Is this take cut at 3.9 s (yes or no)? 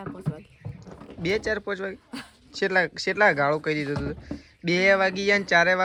no